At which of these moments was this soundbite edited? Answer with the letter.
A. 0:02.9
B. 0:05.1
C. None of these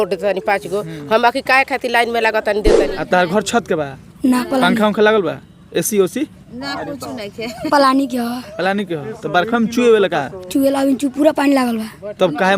A